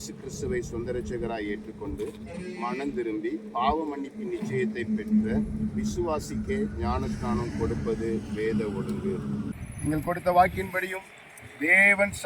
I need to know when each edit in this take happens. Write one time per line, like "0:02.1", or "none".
0:09.5